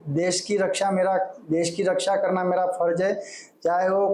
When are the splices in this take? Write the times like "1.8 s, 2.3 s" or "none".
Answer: none